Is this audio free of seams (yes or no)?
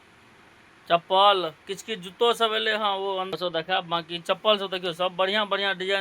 no